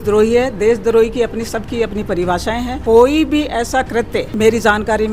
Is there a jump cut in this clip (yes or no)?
yes